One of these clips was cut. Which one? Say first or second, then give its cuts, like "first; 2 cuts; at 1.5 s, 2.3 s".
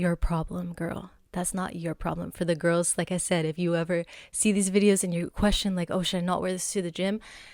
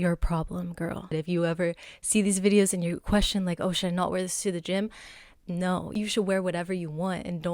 second; 2 cuts; at 1.1 s, 5.9 s